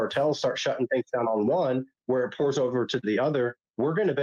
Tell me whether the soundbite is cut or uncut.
uncut